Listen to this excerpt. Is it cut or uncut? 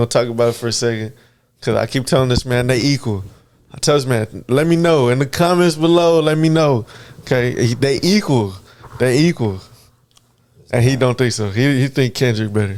uncut